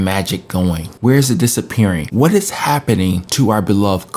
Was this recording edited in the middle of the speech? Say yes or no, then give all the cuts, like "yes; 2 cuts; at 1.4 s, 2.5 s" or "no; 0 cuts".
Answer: no; 0 cuts